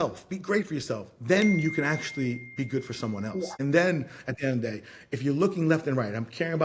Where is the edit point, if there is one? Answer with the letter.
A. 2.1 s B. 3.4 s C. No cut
B